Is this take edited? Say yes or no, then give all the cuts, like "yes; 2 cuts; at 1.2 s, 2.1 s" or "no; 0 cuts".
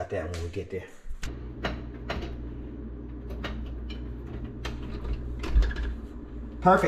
yes; 1 cut; at 1.3 s